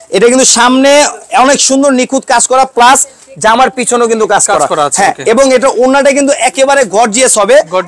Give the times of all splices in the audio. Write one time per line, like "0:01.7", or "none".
none

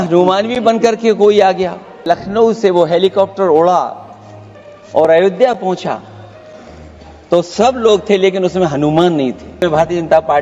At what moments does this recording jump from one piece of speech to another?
0:02.0
0:09.6

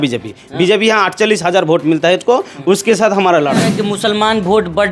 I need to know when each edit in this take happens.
0:03.7

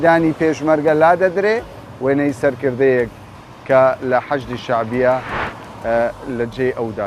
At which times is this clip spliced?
none

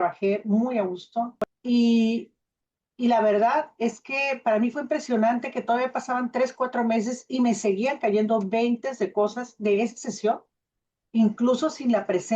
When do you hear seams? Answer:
0:01.5
0:10.7

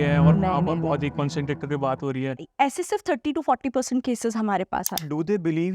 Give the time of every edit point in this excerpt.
0:02.5
0:05.0

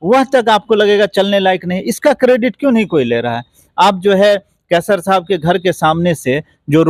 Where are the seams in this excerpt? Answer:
none

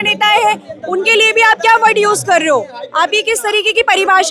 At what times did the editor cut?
none

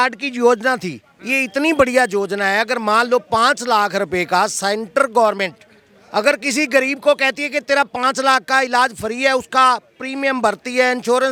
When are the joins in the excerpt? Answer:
none

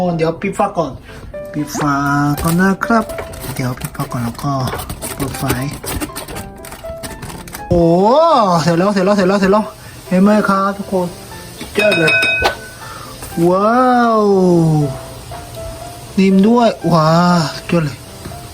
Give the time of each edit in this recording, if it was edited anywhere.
0:07.7

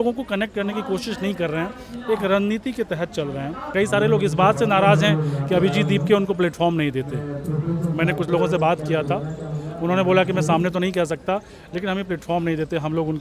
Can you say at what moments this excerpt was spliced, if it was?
0:03.7

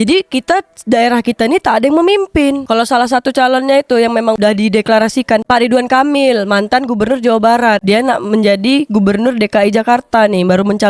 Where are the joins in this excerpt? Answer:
0:02.6

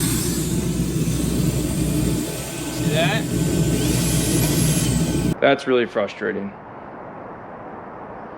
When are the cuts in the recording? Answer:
0:05.3

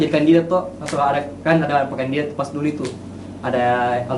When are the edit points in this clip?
none

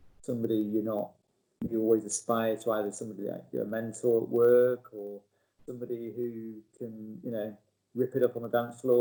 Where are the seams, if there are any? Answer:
none

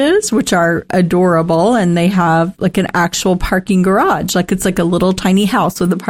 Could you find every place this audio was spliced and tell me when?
none

